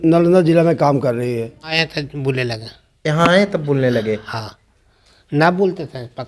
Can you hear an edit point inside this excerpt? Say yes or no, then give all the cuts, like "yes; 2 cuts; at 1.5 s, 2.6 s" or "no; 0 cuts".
yes; 1 cut; at 1.7 s